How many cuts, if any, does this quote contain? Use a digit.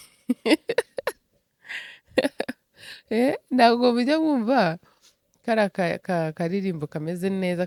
0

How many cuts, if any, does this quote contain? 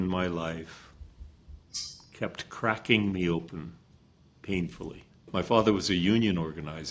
1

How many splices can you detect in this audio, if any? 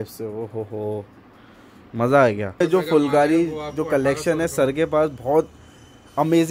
1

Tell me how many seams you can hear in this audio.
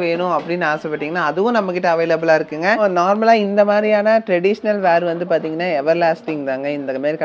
1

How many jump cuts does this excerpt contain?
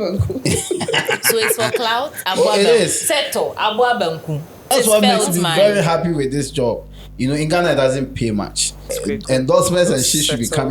2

